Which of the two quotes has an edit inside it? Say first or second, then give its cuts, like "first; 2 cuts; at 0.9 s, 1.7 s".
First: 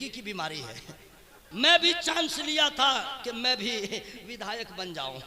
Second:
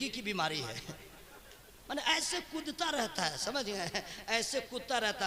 first; 1 cut; at 1.3 s